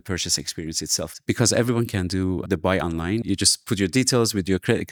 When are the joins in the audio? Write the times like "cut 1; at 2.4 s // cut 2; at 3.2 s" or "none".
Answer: none